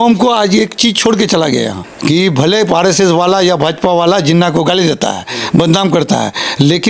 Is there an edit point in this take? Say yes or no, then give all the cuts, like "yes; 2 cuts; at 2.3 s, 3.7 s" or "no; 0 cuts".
yes; 1 cut; at 1.9 s